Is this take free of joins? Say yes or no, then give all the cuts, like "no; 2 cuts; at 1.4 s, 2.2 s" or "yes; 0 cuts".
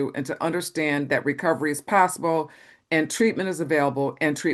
yes; 0 cuts